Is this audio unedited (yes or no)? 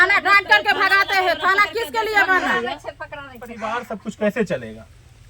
no